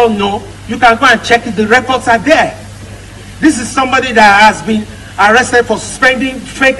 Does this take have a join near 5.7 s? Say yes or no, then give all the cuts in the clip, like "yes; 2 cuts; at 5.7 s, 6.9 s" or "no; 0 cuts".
yes; 1 cut; at 5.7 s